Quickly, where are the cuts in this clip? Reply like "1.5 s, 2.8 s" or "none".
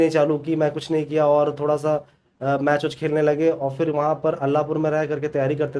none